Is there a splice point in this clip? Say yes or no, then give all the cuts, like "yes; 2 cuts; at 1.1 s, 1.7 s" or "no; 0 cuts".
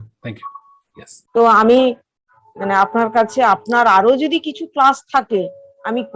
yes; 1 cut; at 1.2 s